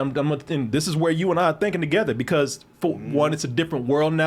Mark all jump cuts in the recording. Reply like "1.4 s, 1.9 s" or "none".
none